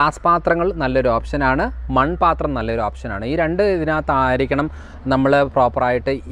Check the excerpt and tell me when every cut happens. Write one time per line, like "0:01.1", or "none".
none